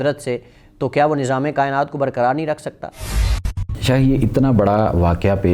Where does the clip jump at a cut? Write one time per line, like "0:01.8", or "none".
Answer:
0:03.1